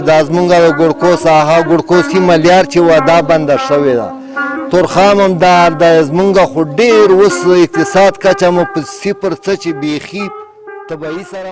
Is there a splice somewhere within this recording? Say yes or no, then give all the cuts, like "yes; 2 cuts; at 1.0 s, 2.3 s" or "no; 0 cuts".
no; 0 cuts